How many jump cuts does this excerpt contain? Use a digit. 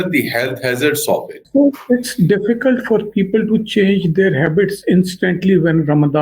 0